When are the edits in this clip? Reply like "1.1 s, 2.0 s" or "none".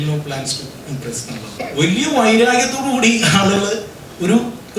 1.6 s